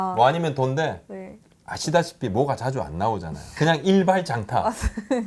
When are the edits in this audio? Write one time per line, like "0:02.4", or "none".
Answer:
0:03.4

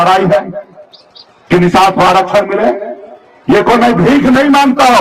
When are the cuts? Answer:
none

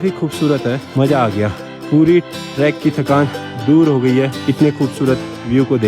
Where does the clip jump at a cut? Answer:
0:00.9
0:01.7
0:04.4

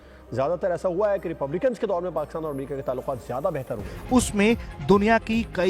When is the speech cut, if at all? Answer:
0:03.9

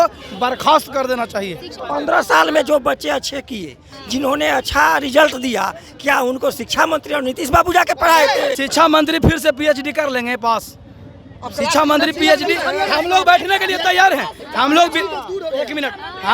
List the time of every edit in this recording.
0:01.8
0:08.6

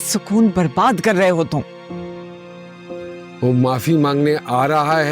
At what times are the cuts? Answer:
none

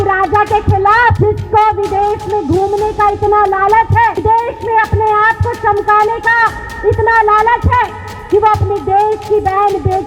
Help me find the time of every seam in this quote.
0:01.2
0:04.2

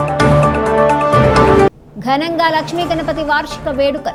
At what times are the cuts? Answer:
none

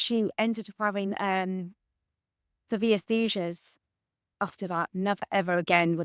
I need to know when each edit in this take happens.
0:04.8

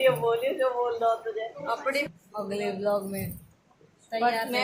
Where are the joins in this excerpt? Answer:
0:02.1

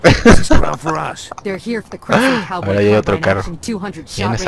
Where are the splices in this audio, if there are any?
0:02.3

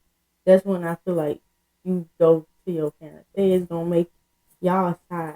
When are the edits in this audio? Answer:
0:03.3

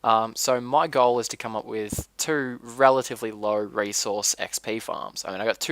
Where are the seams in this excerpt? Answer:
0:02.9

